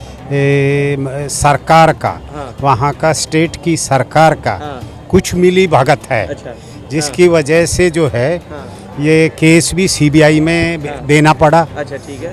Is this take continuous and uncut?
yes; 0 cuts

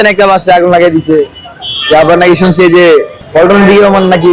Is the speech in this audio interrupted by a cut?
yes; 1 cut; at 3.2 s

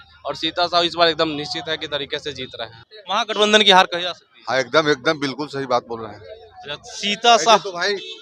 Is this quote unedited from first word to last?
no; 1 cut; at 2.9 s

